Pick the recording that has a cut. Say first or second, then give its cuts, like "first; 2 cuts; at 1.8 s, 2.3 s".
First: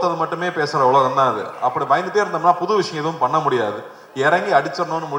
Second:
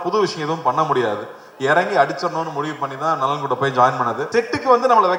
second; 1 cut; at 4.2 s